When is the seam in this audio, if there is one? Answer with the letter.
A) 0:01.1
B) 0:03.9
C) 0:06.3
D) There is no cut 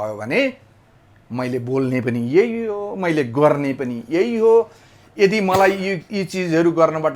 D